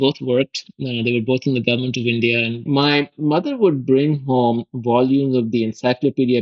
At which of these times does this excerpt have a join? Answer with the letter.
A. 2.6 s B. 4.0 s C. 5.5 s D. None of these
A